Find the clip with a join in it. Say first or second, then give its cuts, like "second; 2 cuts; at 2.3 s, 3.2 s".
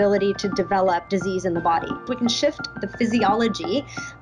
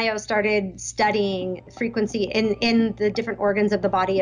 first; 2 cuts; at 1.1 s, 2.0 s